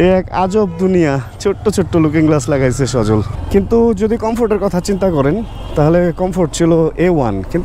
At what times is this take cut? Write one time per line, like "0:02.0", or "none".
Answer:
0:03.4